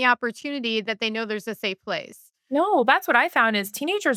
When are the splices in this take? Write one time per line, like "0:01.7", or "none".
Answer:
none